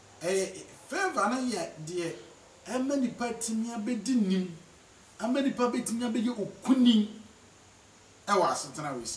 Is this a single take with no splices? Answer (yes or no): yes